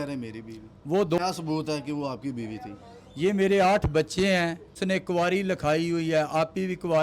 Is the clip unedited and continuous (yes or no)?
no